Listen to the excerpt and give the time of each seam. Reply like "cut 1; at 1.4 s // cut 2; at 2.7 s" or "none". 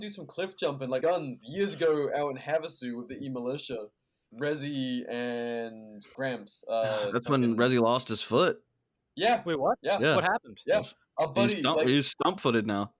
cut 1; at 1.0 s // cut 2; at 4.2 s